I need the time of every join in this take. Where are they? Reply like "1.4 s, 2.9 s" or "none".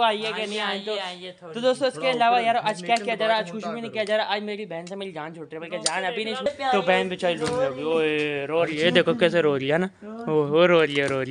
6.5 s